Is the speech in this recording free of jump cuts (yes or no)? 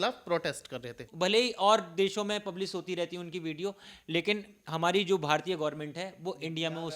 no